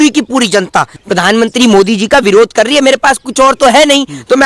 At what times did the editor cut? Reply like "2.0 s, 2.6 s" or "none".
1.0 s